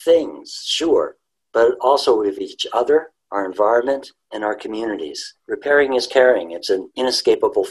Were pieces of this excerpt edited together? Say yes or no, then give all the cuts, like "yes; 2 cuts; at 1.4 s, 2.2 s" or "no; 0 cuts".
yes; 3 cuts; at 3.2 s, 5.3 s, 6.9 s